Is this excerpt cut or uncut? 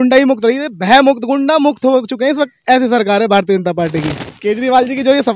cut